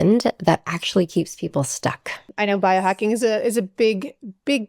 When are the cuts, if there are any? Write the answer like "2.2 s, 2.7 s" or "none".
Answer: 2.3 s